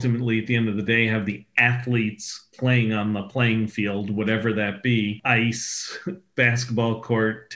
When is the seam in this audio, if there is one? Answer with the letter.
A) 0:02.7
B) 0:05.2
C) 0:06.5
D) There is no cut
B